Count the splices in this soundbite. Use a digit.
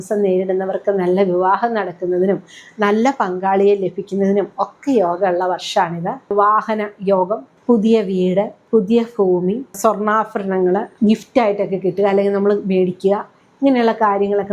5